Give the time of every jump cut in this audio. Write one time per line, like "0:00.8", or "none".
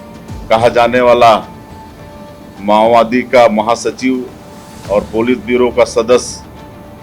none